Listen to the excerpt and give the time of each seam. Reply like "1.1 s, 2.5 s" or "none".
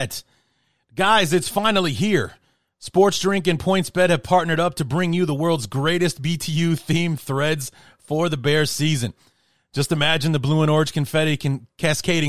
none